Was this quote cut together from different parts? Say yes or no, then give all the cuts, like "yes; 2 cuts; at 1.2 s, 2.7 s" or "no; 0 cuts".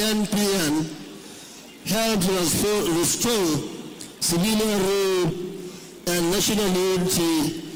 no; 0 cuts